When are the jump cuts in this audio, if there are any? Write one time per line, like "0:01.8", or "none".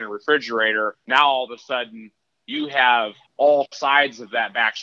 0:01.0
0:03.2